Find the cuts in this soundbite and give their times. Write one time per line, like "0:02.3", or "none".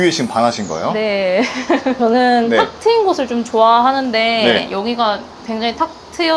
0:02.0

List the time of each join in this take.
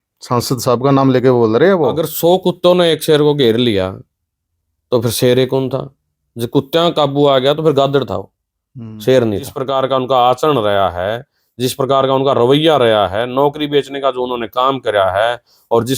0:02.1
0:09.6

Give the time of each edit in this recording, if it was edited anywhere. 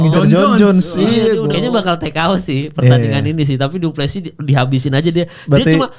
0:01.5

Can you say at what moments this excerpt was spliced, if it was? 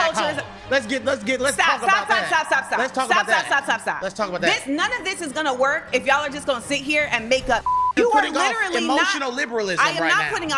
0:07.9

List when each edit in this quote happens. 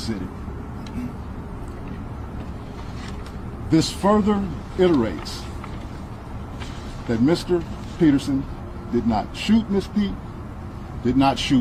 none

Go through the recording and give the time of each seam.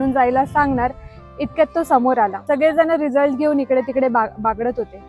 0:02.4

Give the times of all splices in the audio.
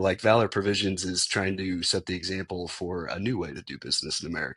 none

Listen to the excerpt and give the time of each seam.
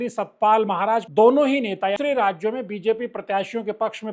0:01.1
0:02.0

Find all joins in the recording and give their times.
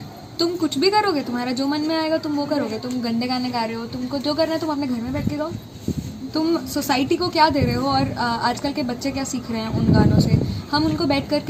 none

